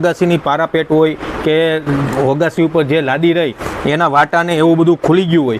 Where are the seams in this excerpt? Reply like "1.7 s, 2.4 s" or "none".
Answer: none